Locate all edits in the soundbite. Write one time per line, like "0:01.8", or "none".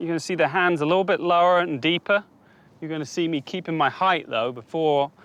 none